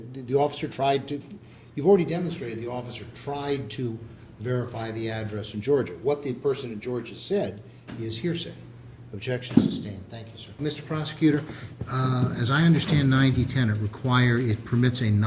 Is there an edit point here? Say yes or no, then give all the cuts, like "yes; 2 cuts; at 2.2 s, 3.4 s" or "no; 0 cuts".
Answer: yes; 1 cut; at 10.5 s